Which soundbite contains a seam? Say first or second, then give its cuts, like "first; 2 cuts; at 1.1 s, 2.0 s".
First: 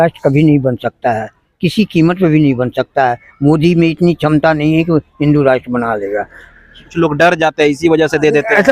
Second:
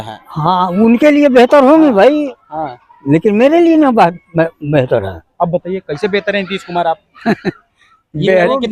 first; 1 cut; at 6.9 s